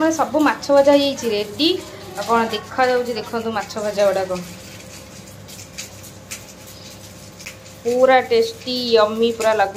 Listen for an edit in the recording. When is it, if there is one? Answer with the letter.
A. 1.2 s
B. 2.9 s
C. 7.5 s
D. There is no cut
C